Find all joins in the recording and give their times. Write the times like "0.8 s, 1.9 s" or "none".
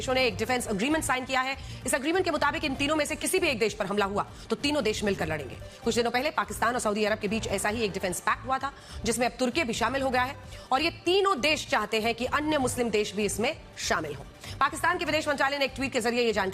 none